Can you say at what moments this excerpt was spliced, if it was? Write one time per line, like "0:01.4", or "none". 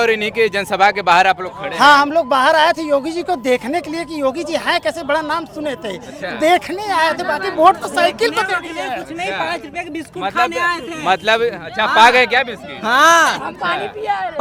none